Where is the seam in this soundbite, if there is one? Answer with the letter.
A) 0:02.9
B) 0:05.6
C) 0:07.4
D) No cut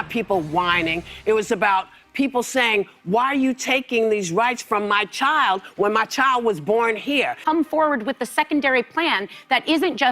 C